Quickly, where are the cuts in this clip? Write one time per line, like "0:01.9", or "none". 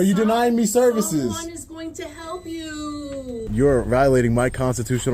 0:03.5

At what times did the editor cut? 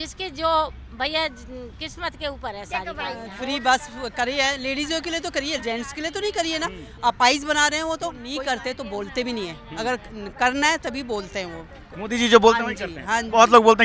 0:03.3
0:08.2

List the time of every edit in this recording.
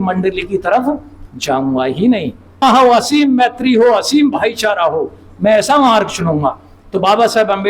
0:02.6

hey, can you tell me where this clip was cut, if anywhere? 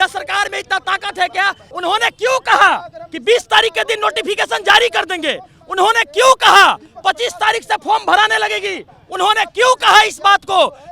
0:01.6

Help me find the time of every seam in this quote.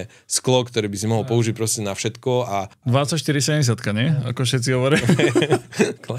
0:02.8

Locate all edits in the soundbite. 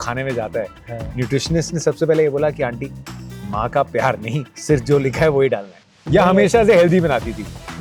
none

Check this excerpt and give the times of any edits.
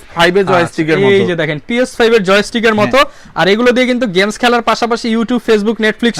none

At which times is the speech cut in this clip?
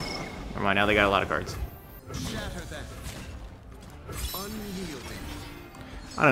0:01.9
0:03.9

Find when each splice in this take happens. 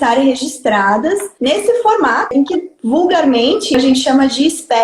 0:01.3
0:02.3
0:03.7

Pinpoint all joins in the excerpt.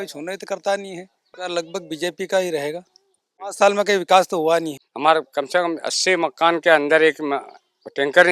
0:01.3
0:03.5
0:04.8

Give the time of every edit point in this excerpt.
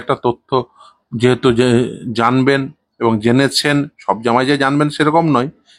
none

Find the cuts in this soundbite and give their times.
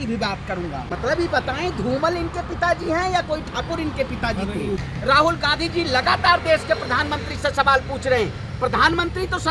0:00.9
0:04.8

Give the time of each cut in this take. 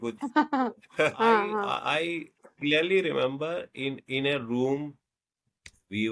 0:01.7

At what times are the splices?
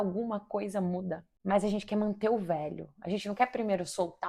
0:01.3

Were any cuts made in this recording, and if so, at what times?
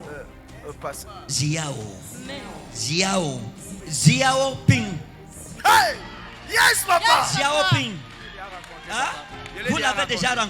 0:03.7

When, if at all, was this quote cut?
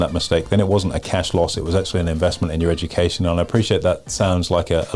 none

